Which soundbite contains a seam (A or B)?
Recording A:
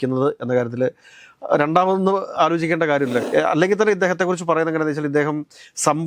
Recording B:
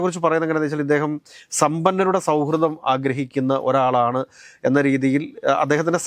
A